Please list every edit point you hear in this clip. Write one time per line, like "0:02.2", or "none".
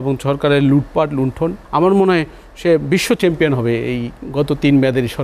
0:01.6